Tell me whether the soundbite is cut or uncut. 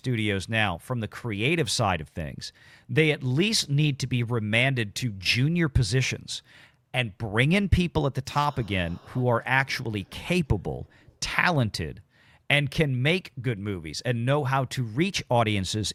uncut